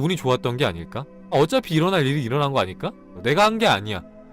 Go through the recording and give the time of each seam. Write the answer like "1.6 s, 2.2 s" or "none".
1.3 s, 3.1 s